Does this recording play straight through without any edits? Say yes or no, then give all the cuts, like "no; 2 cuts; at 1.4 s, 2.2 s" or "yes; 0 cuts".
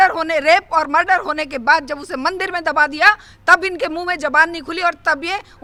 yes; 0 cuts